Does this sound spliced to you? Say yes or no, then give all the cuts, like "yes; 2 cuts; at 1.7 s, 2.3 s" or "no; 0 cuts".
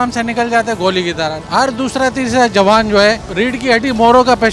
yes; 2 cuts; at 1.4 s, 3.3 s